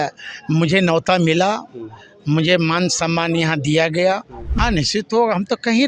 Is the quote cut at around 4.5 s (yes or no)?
yes